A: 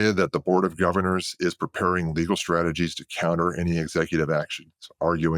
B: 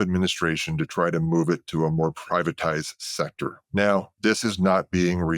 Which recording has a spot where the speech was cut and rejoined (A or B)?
B